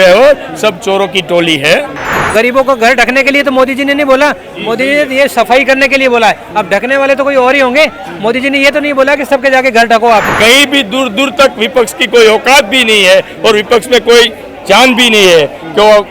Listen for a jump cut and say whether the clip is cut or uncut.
cut